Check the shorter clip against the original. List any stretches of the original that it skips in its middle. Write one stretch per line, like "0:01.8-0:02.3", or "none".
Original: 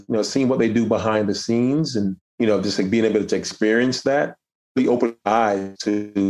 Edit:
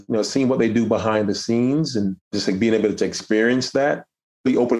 0:02.3-0:02.6

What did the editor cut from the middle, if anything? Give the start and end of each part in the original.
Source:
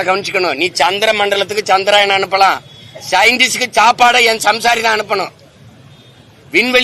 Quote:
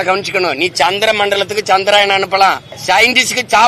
0:02.7-0:02.9

